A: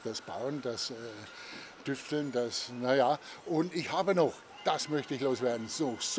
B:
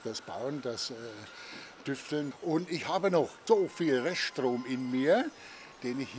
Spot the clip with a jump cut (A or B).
B